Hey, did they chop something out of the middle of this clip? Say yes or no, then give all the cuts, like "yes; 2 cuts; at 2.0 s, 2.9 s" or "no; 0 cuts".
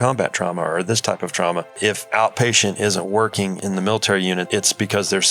yes; 3 cuts; at 1.8 s, 3.6 s, 4.5 s